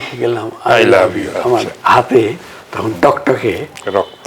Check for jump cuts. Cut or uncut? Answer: uncut